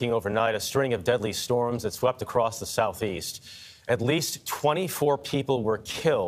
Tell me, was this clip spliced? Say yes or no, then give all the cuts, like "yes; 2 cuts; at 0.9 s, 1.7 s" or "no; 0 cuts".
no; 0 cuts